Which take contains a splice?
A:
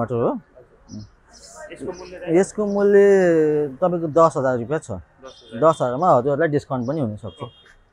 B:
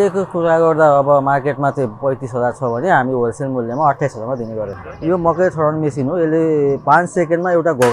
B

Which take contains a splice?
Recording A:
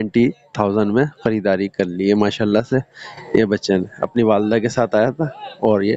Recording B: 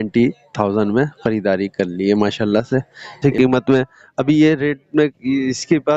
B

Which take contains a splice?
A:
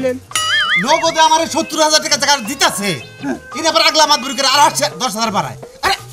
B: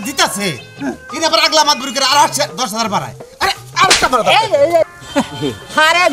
B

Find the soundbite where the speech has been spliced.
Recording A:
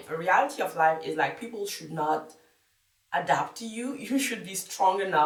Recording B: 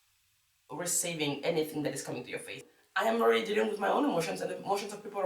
B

